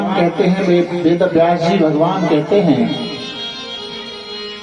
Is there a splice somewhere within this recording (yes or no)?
no